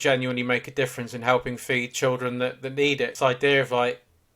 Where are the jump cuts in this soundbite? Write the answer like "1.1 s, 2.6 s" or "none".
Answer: 3.1 s